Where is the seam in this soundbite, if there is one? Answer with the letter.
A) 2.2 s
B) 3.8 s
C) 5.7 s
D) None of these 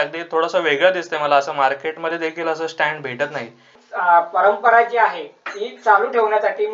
B